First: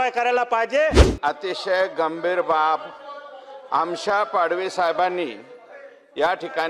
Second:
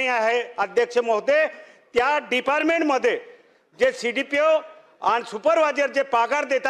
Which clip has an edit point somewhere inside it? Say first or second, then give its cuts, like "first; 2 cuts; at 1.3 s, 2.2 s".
first; 1 cut; at 1.1 s